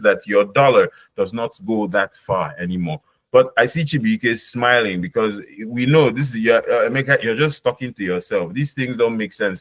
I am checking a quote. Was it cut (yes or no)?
no